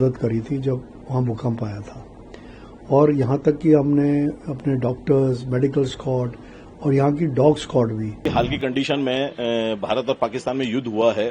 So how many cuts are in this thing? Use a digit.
1